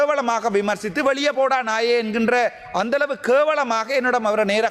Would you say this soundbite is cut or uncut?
uncut